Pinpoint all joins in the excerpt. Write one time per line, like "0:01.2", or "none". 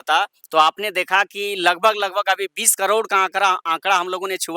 none